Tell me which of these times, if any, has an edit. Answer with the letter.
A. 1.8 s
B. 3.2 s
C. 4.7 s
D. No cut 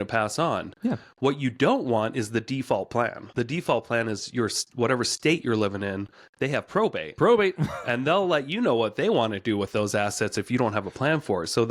B